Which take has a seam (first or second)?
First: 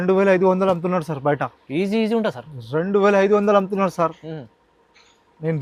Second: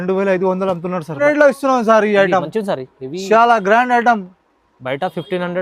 second